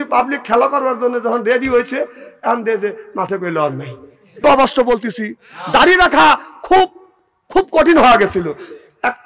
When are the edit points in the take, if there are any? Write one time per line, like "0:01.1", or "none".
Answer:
0:04.4